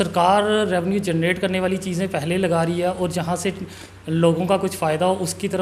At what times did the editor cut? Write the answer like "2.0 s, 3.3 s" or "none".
none